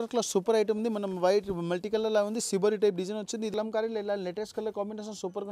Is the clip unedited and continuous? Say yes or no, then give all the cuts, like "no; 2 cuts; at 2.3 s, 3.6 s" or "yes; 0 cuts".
no; 1 cut; at 3.5 s